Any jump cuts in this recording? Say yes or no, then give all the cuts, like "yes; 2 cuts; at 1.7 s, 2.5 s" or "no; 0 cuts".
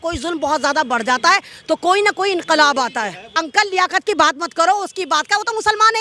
yes; 1 cut; at 3.4 s